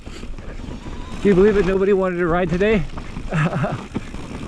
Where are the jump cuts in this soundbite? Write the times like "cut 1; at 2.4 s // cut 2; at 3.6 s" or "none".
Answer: cut 1; at 1.2 s